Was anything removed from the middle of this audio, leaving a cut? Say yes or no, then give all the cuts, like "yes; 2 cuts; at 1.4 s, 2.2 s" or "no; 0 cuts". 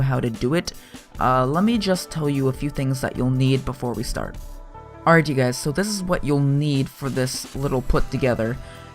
yes; 1 cut; at 7.3 s